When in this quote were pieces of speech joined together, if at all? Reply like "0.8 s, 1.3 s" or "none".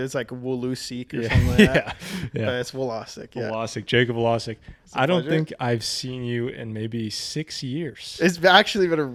none